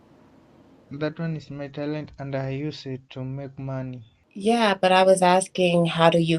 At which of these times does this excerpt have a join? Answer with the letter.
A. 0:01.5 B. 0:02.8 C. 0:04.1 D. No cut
C